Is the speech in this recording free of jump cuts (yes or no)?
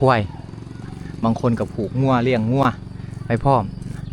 yes